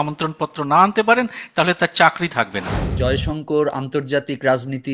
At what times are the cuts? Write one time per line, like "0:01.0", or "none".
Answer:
0:02.9